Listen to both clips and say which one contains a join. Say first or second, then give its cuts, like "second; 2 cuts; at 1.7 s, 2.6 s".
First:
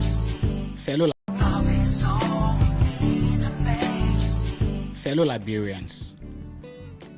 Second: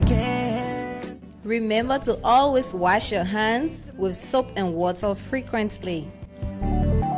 first; 1 cut; at 1.1 s